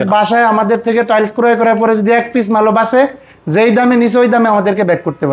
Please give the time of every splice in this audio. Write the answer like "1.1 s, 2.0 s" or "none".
none